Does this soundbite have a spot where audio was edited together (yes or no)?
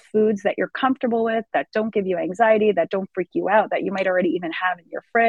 no